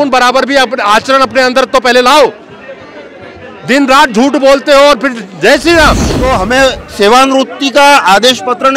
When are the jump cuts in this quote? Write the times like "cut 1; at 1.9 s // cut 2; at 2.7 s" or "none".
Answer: cut 1; at 6.1 s